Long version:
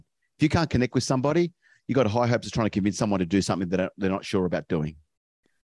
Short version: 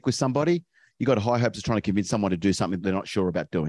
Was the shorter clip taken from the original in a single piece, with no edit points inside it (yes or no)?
no